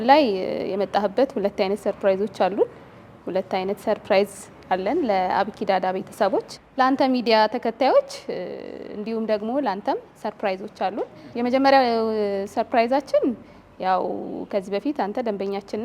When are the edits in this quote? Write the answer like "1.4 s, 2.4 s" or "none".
none